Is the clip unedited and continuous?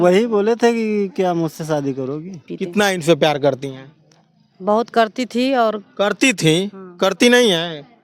no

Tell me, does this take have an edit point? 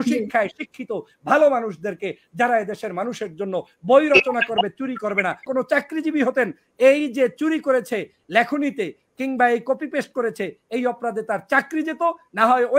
yes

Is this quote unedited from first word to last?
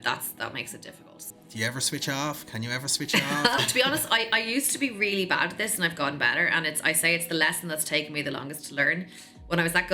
no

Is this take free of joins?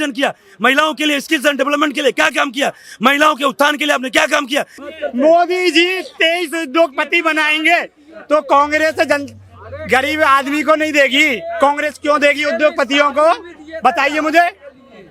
no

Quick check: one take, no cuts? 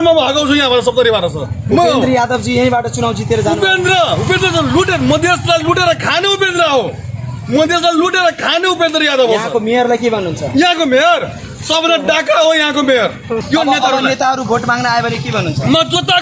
no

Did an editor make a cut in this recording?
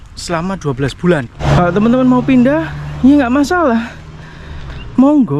yes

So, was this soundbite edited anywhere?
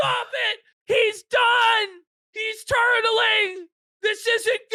no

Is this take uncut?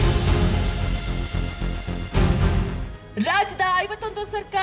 no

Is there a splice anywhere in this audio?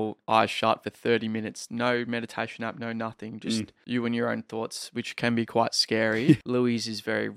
yes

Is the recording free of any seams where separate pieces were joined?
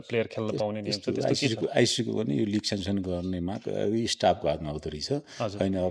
yes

